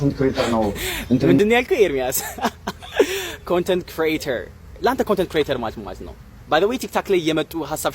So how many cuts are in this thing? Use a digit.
0